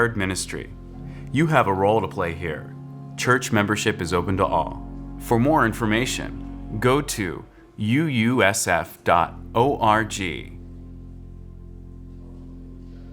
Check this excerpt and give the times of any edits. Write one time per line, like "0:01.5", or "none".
0:10.4